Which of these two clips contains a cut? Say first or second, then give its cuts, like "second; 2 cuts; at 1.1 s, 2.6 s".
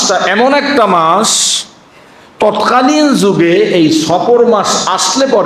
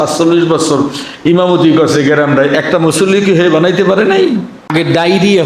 second; 1 cut; at 4.6 s